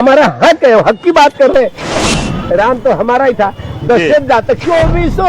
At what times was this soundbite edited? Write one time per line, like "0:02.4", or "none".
0:02.0